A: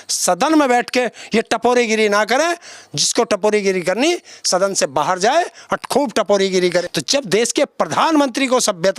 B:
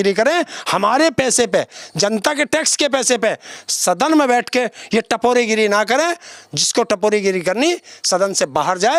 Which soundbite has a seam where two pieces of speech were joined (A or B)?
A